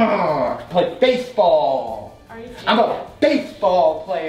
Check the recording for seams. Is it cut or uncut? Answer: uncut